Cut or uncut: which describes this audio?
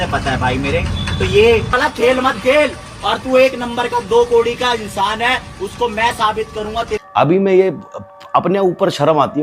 cut